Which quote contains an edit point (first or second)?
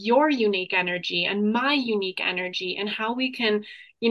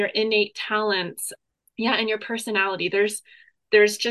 second